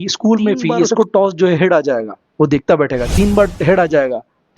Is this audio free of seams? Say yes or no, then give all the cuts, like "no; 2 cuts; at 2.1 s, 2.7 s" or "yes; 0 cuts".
no; 1 cut; at 0.9 s